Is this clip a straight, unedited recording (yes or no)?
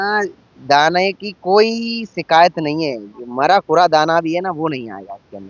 yes